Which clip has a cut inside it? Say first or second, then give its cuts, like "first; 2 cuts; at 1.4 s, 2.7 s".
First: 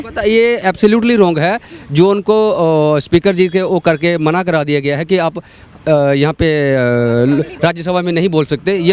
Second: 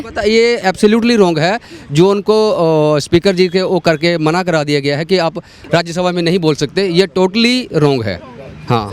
second; 1 cut; at 5.6 s